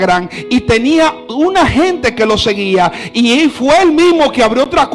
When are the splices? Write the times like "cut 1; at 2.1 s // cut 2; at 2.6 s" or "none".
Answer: none